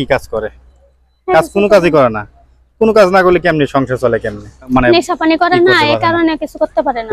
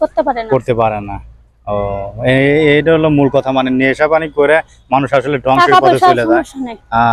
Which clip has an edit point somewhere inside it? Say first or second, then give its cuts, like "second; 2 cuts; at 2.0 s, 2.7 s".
first; 1 cut; at 4.7 s